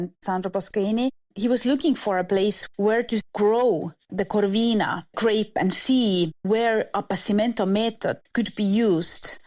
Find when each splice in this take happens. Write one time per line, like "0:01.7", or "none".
0:01.2
0:08.2

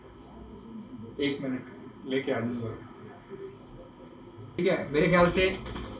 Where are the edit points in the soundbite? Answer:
0:04.6

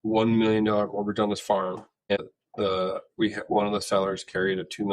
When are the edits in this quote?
0:02.2

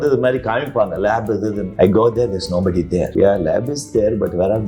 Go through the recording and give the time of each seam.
0:01.6
0:03.1

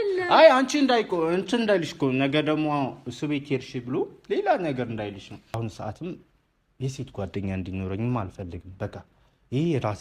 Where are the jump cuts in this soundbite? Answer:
0:05.6

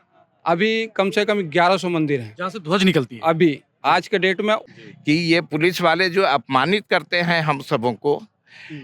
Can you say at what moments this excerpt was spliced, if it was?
0:04.6

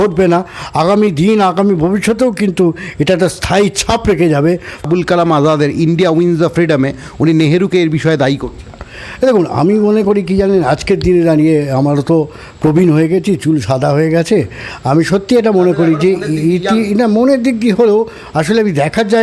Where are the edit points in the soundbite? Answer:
0:04.9

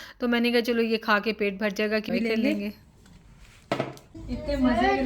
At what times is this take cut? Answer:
0:02.1

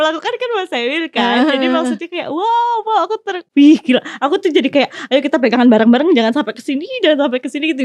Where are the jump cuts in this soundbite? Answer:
0:03.4

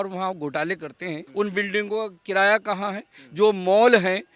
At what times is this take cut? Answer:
0:01.2

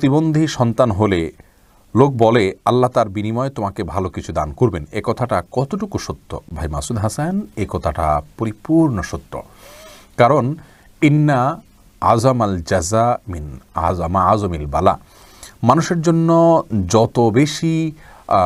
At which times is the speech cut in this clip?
none

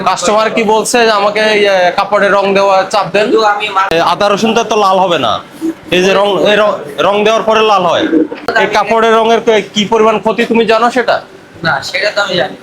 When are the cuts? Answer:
0:03.9
0:08.5

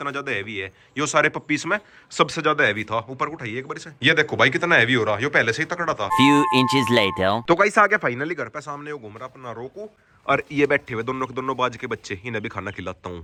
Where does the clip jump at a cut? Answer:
none

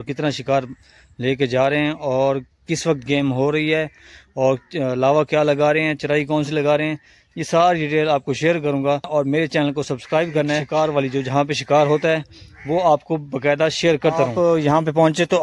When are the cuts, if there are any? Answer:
0:09.1
0:10.7
0:14.3

